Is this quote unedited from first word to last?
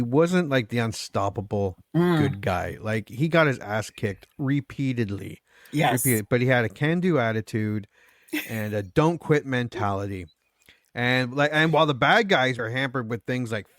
no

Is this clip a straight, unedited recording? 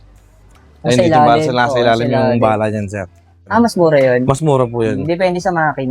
no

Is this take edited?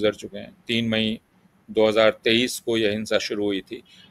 no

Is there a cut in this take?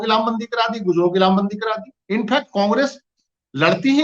yes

